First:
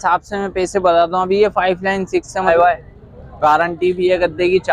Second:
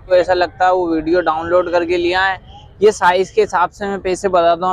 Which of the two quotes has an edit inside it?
first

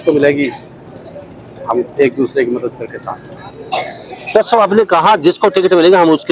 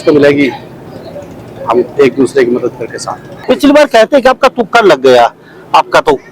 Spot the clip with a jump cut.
second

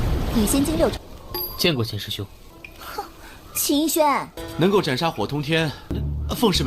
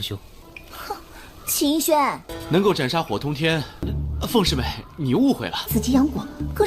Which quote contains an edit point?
second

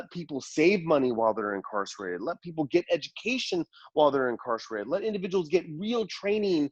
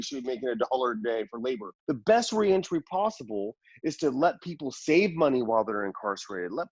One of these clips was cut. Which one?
second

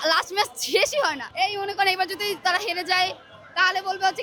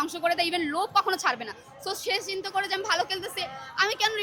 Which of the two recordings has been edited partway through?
first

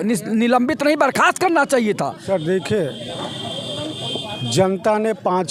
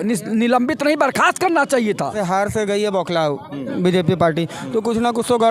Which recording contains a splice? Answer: second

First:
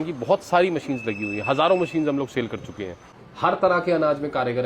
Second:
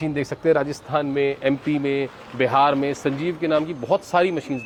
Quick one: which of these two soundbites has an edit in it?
first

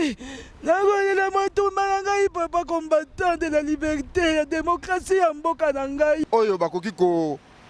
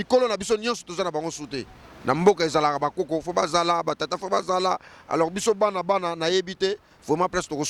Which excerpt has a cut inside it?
first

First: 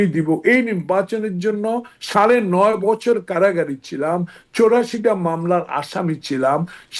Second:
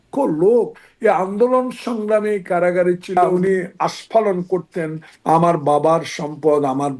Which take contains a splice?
second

